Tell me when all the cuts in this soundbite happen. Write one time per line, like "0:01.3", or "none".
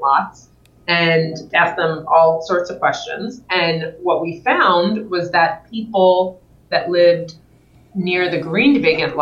0:01.4